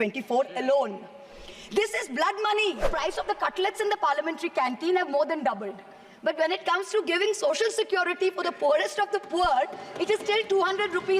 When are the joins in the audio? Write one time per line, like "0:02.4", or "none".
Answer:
0:02.9